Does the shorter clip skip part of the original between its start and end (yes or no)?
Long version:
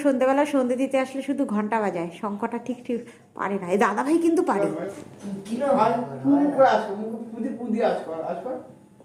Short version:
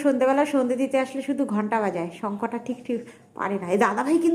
no